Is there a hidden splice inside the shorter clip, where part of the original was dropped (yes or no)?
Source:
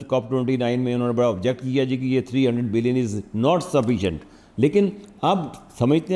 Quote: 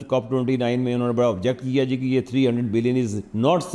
no